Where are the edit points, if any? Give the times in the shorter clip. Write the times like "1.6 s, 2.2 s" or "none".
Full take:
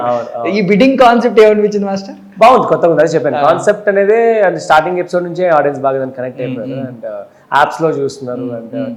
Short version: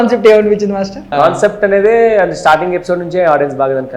1.1 s